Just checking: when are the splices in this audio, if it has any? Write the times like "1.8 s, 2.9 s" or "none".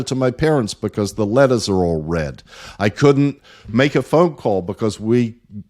none